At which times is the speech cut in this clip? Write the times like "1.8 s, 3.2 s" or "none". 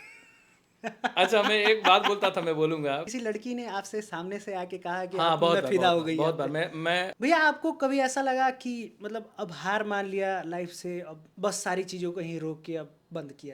3.0 s, 7.1 s